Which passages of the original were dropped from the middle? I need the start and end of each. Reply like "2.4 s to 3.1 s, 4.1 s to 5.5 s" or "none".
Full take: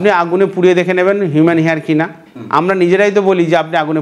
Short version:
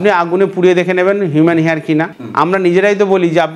2.2 s to 2.4 s